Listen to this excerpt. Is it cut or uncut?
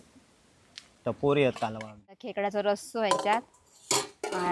cut